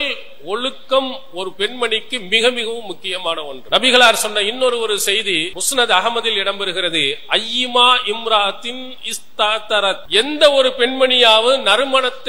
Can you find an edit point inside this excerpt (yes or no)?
yes